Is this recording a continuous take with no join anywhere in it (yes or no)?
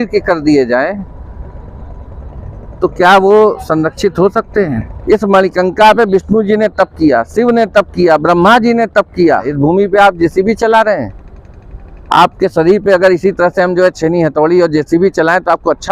no